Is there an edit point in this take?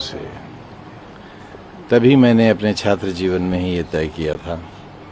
no; 0 cuts

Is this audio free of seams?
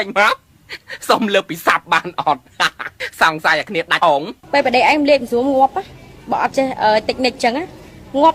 yes; 0 cuts

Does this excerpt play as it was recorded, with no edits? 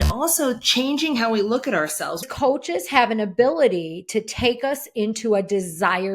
no; 1 cut; at 2.3 s

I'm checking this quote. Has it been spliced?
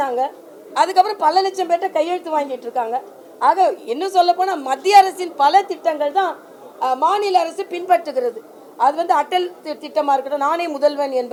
no; 0 cuts

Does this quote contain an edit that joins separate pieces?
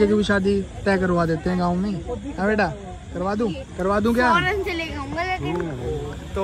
no; 0 cuts

